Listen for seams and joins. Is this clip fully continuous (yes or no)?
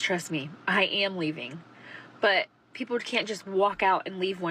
yes